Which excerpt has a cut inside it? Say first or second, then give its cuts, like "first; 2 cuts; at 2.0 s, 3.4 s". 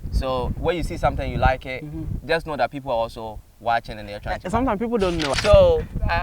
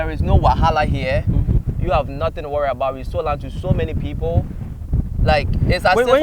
first; 1 cut; at 5.3 s